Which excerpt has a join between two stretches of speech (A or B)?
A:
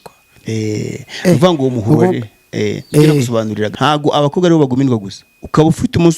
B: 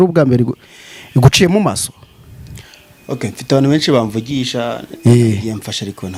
A